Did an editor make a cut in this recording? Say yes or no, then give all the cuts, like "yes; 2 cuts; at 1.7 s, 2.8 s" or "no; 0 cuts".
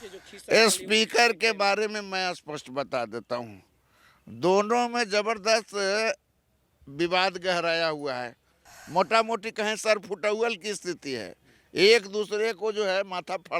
no; 0 cuts